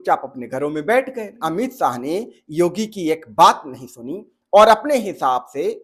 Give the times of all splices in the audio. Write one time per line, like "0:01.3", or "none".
0:01.4